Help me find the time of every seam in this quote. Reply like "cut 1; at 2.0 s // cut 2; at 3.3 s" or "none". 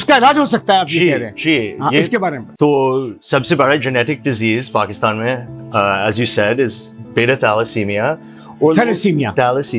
none